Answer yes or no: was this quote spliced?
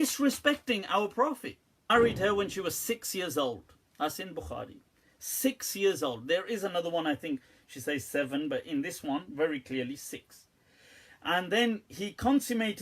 yes